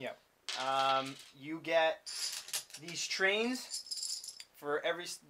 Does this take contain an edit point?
no; 0 cuts

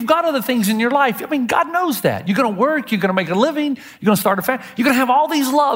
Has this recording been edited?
no; 0 cuts

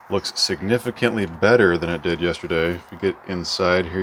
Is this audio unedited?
yes; 0 cuts

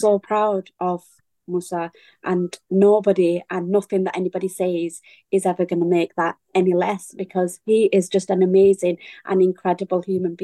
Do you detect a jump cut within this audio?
no; 0 cuts

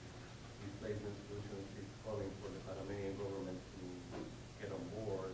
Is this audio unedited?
yes; 0 cuts

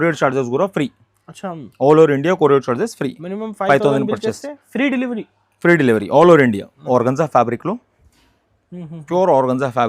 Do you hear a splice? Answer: yes; 1 cut; at 6.8 s

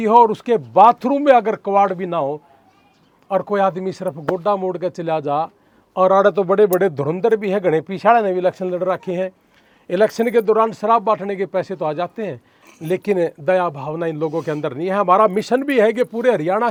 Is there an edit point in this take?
no; 0 cuts

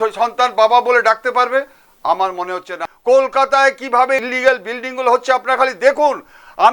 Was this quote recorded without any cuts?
no; 2 cuts; at 2.7 s, 4.2 s

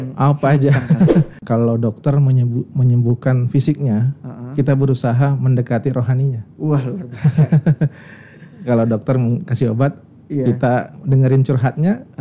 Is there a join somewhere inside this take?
yes; 1 cut; at 1.4 s

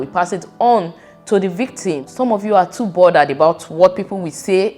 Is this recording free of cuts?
no; 1 cut; at 2.1 s

